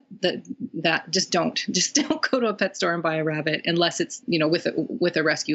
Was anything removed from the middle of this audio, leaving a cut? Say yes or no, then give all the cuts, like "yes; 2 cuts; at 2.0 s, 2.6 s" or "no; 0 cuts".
yes; 1 cut; at 4.2 s